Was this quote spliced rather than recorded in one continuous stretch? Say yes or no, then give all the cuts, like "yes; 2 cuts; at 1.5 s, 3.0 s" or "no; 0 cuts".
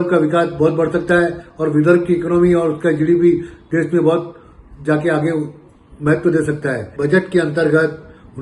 yes; 1 cut; at 6.9 s